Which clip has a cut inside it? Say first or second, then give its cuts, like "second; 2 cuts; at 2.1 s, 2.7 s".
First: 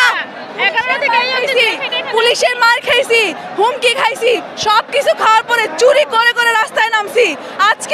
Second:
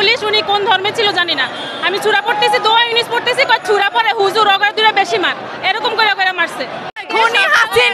second; 1 cut; at 6.8 s